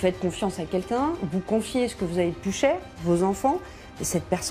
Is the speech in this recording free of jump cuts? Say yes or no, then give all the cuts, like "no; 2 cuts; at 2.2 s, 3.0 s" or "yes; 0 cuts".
yes; 0 cuts